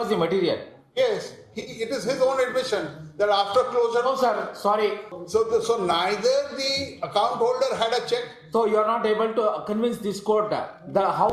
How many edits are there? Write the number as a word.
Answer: one